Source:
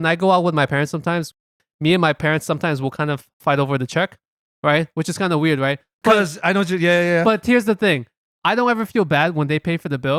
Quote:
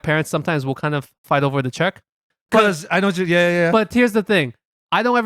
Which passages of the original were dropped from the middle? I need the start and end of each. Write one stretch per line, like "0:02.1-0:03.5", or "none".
0:04.5-0:05.9